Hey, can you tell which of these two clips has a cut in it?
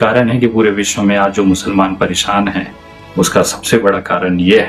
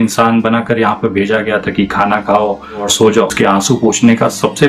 second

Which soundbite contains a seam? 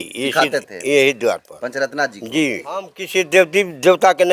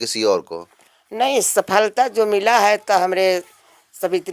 first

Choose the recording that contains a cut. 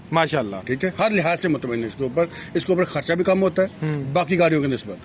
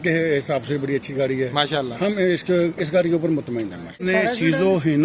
second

